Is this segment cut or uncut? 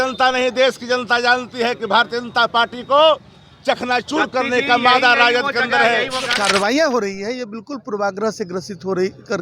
cut